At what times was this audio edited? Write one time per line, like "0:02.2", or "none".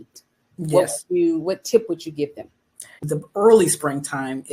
0:03.0